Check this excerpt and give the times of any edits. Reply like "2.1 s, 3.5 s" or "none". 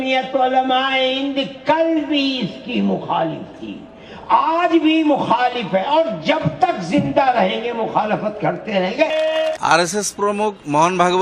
9.6 s